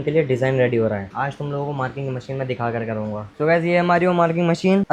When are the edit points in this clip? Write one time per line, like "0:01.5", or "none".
0:03.3

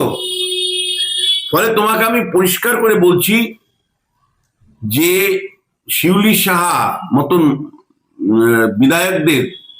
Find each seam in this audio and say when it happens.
none

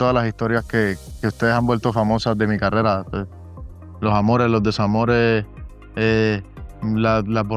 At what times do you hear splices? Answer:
none

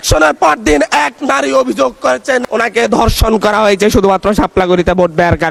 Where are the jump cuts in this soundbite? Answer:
none

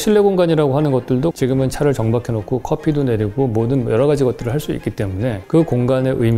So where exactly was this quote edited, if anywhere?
0:01.3

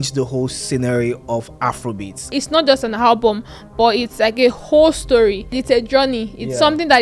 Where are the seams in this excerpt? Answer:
0:02.4
0:05.6

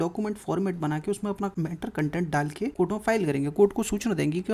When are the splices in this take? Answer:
0:01.5
0:02.7

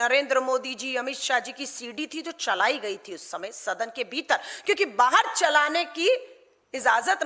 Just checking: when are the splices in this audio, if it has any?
none

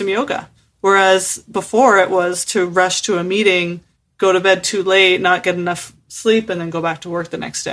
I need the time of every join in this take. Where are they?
none

